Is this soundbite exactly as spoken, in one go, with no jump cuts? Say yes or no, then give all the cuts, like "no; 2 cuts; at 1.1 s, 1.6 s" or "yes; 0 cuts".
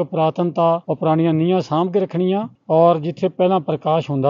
yes; 0 cuts